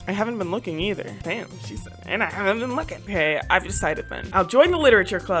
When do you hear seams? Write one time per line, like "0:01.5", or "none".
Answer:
0:01.2
0:03.1
0:04.2